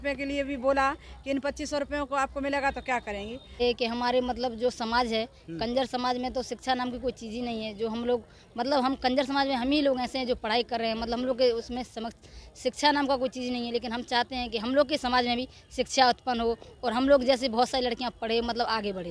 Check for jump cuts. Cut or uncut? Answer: cut